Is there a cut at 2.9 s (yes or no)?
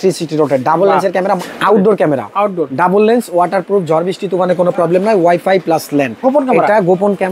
no